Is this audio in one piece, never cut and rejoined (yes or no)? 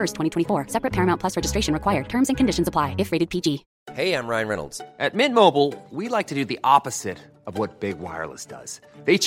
no